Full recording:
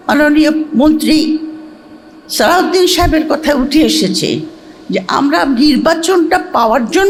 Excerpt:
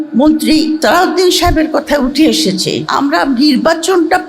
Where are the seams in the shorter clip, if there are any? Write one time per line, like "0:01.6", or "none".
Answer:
0:00.8
0:02.9